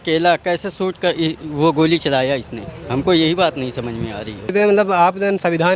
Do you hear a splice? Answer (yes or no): yes